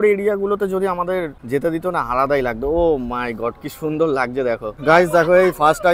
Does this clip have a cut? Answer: yes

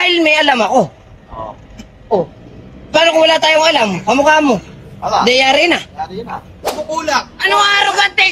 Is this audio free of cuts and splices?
no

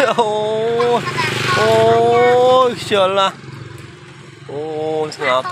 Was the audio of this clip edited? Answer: no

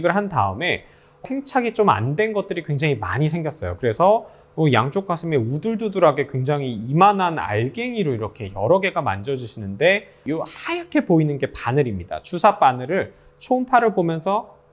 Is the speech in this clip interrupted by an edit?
yes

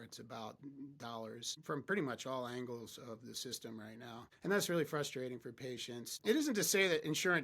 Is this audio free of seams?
no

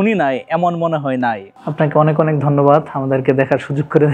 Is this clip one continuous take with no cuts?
no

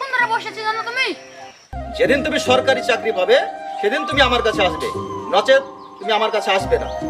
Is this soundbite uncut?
no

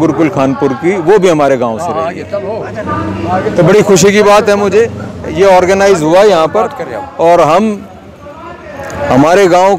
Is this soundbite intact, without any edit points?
yes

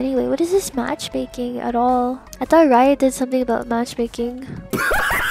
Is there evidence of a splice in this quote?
no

